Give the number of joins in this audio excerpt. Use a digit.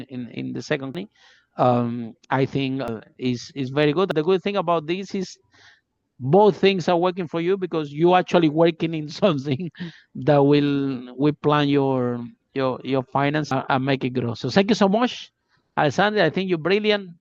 4